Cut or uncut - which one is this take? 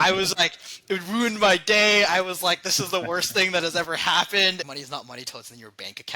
cut